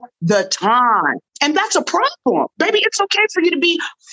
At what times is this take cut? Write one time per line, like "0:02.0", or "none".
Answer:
0:01.1
0:02.5